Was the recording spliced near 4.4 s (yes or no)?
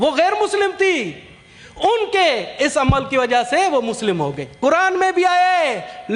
yes